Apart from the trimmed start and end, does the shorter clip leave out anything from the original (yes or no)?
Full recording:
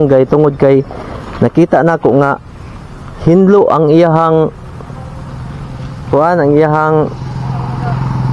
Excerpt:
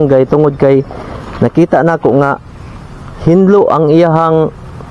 no